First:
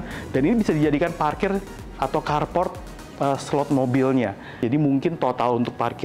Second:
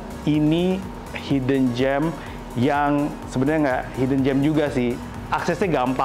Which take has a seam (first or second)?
first